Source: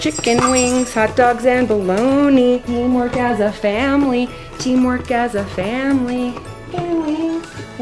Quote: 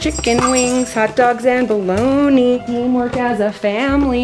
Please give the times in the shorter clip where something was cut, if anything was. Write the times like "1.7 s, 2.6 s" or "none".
none